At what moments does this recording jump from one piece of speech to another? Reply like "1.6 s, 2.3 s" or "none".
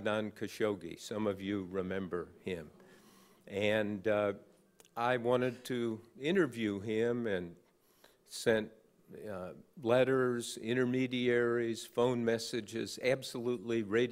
4.0 s

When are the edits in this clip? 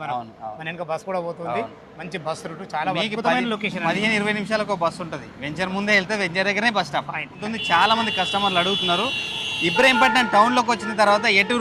7.4 s

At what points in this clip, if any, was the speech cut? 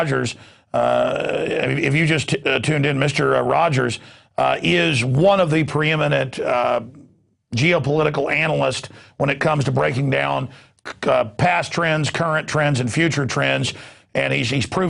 none

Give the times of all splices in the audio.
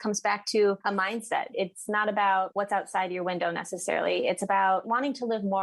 1.3 s, 2.5 s

